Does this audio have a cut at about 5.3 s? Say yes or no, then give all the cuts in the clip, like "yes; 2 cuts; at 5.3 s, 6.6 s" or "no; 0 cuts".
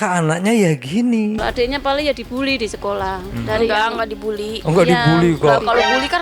no; 1 cut; at 1.4 s